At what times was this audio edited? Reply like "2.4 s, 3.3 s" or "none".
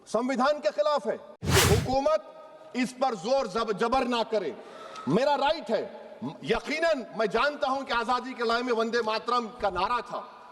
1.3 s